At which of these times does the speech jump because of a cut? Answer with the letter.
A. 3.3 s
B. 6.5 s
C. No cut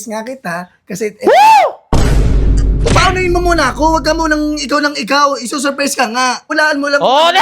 B